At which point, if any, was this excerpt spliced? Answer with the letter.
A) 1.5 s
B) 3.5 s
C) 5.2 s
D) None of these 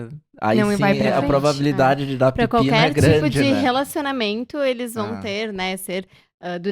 D